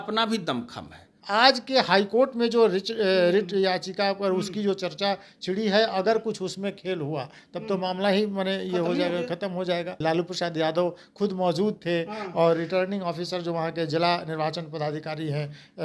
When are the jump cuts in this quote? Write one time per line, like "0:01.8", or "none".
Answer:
0:01.1
0:10.0